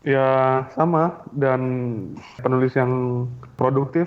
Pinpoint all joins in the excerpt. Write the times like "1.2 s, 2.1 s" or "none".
2.4 s